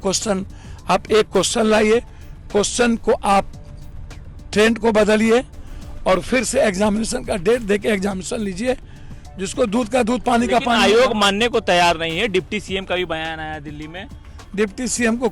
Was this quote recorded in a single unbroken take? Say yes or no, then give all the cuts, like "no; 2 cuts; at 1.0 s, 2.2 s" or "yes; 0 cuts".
yes; 0 cuts